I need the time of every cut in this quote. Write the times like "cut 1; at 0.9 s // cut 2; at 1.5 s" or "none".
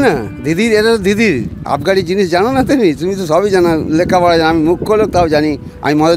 none